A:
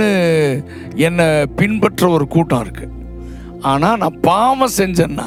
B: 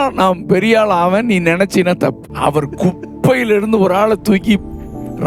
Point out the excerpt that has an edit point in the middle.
B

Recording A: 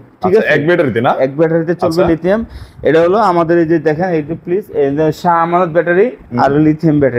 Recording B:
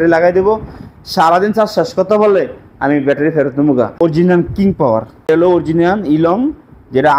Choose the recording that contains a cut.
B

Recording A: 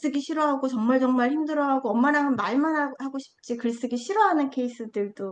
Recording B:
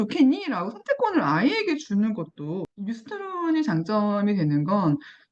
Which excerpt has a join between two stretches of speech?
B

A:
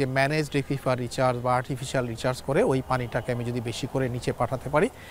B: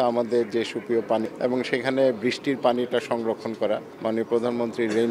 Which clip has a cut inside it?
B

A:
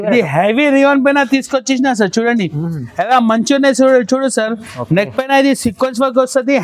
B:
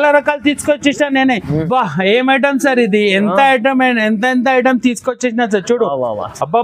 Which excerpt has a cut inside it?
B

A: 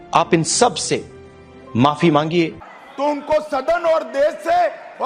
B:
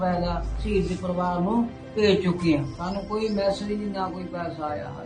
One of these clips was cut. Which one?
A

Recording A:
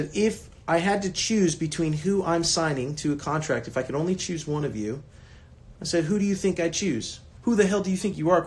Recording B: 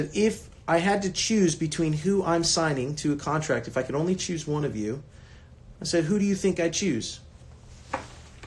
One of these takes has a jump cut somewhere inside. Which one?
A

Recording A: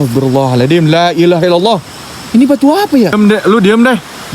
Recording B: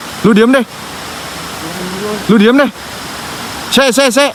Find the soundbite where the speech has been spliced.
A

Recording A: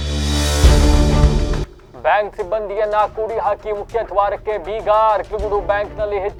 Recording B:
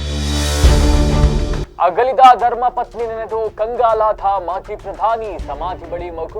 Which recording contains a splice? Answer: B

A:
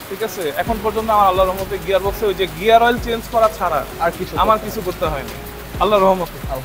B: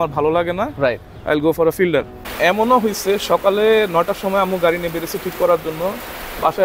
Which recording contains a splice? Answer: B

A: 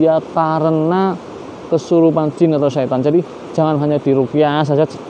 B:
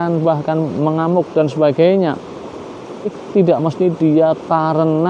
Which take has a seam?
B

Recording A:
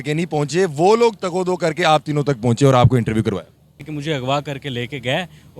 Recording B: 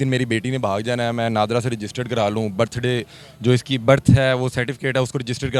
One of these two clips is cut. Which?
A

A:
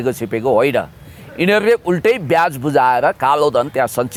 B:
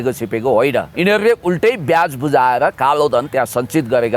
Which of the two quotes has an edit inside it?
B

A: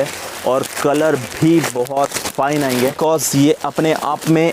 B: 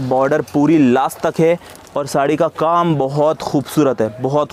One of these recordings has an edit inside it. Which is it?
A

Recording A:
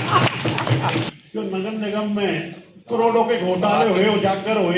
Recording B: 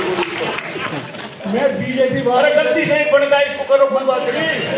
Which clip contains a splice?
A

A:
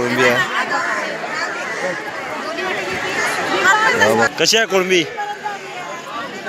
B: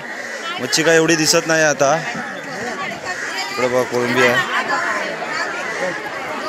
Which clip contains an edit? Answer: A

